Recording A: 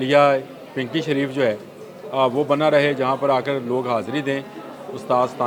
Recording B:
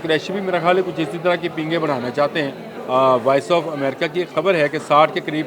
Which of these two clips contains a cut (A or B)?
B